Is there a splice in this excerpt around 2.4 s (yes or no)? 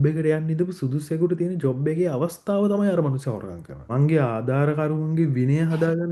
no